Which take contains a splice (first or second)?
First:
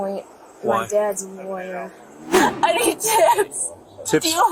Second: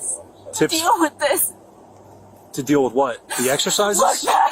first